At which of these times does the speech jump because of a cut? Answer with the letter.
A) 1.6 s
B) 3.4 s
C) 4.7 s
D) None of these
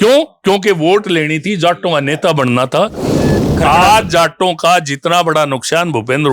B